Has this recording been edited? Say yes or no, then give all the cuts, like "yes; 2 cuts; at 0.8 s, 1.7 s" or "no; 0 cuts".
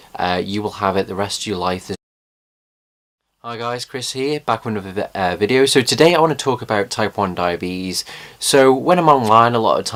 no; 0 cuts